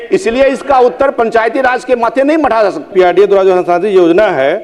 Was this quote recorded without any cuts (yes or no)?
no